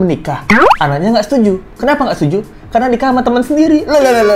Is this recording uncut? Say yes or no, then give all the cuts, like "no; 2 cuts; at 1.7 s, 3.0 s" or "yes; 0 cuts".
yes; 0 cuts